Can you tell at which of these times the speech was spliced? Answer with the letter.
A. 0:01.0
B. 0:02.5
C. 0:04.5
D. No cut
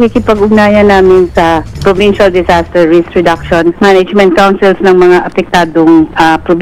D